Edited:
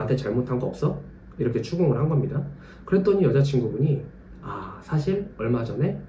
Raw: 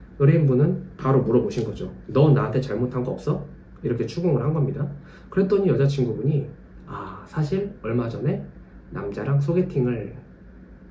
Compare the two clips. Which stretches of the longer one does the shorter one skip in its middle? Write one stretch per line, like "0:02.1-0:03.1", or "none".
none